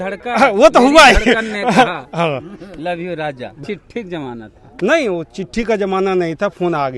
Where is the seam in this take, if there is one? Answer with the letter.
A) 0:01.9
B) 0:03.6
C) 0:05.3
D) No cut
B